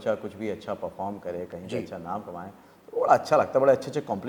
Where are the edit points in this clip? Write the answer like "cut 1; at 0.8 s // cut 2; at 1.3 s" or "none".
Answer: none